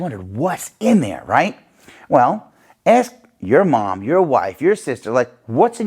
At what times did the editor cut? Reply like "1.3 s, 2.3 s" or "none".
none